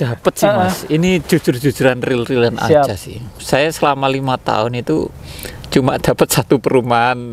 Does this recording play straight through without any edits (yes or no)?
yes